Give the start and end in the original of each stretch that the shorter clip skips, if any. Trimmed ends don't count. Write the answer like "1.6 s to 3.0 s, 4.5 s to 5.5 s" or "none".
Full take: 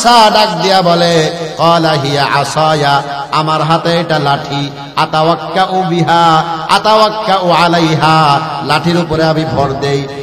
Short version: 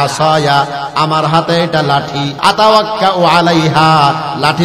4.7 s to 6.6 s